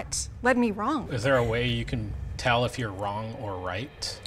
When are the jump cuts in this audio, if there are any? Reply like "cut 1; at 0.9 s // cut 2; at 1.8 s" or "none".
cut 1; at 1.1 s